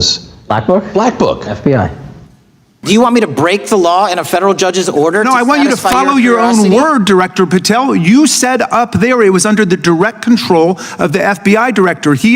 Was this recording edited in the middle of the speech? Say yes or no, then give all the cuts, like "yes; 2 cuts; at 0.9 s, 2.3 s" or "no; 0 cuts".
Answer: yes; 1 cut; at 2.8 s